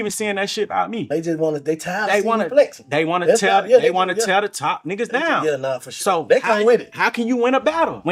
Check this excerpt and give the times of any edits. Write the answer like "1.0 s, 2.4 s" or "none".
none